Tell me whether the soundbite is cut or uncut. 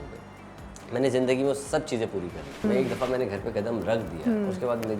cut